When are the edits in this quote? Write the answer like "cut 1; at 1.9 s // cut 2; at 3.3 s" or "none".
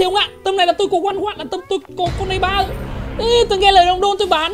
none